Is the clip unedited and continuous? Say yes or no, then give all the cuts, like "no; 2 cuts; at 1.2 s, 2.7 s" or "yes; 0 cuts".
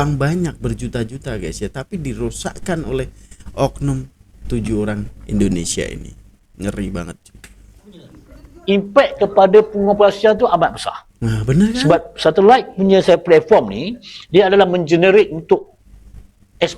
yes; 0 cuts